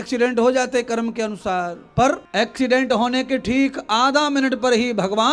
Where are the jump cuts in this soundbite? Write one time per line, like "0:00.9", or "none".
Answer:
0:02.2

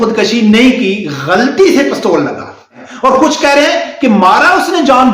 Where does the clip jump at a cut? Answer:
0:02.8

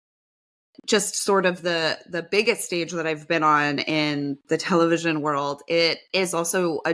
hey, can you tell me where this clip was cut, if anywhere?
none

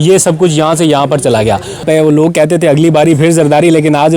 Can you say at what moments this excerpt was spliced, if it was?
0:01.8

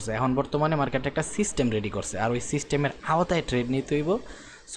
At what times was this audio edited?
none

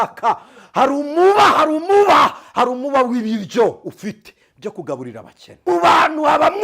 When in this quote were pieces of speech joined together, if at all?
0:05.6

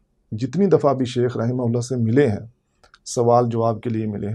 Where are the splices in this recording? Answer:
none

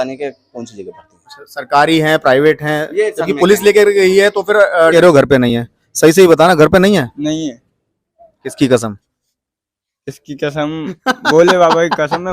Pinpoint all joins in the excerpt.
0:04.9

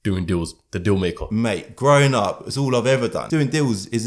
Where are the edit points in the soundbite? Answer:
0:01.2
0:03.2

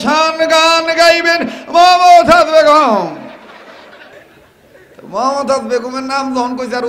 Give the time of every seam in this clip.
0:04.1

